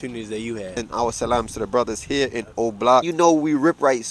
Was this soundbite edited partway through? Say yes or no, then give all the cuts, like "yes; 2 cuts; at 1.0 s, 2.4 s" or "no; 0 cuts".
yes; 2 cuts; at 0.8 s, 3.1 s